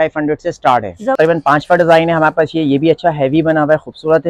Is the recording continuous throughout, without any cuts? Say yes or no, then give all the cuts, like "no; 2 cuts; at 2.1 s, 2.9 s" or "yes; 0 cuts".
no; 1 cut; at 1.1 s